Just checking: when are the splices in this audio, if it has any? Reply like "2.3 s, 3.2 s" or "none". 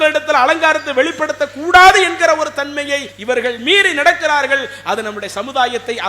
3.1 s